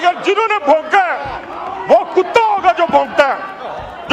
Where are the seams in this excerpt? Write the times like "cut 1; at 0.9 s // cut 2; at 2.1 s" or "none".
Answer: none